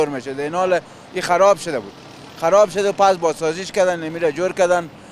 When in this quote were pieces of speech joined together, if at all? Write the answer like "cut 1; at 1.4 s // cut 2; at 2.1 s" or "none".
none